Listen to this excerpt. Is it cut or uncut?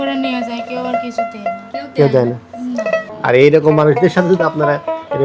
cut